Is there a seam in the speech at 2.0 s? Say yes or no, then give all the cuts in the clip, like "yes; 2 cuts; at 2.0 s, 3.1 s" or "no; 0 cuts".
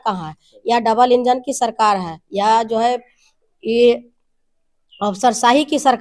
no; 0 cuts